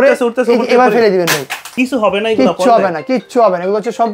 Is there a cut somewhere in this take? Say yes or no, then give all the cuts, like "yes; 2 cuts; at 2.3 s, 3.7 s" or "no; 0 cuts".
yes; 1 cut; at 1.7 s